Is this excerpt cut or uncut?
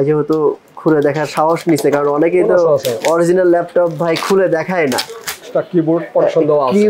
cut